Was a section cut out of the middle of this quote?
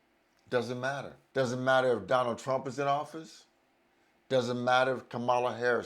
yes; 1 cut; at 1.1 s

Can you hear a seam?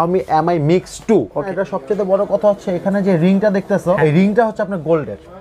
yes; 2 cuts; at 1.4 s, 4.0 s

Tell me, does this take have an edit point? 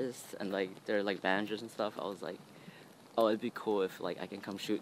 no; 0 cuts

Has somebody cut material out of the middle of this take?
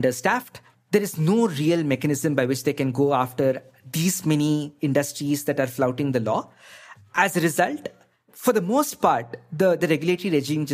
no; 0 cuts

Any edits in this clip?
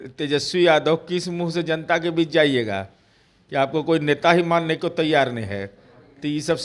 no; 0 cuts

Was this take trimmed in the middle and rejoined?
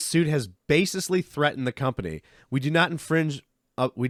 no; 0 cuts

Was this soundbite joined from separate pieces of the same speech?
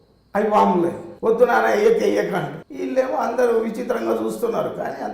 yes; 2 cuts; at 1.1 s, 2.6 s

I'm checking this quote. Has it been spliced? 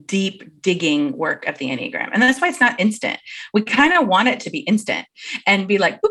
no; 0 cuts

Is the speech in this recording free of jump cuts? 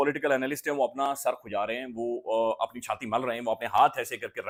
yes; 0 cuts

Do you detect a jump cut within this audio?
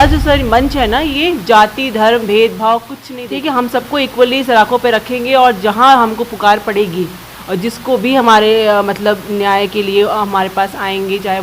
yes; 1 cut; at 3.0 s

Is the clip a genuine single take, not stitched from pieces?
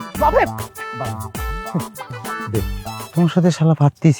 no; 1 cut; at 3.0 s

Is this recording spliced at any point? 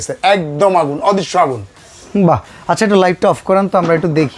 no; 0 cuts

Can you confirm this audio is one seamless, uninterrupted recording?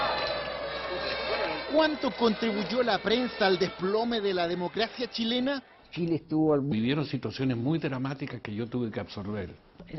yes; 0 cuts

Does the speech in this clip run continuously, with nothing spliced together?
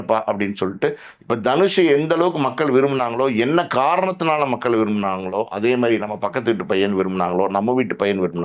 yes; 0 cuts

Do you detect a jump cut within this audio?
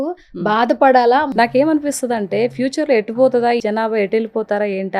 yes; 2 cuts; at 1.3 s, 3.6 s

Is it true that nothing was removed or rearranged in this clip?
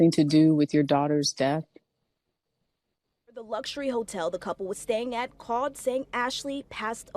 no; 1 cut; at 3.5 s

